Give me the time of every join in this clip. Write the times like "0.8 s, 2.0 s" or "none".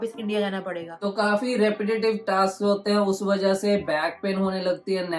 0.9 s